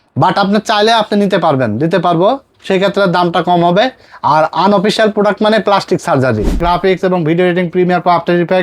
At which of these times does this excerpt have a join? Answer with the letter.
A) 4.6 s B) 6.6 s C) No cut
B